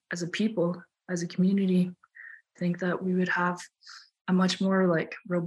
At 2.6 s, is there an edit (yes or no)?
yes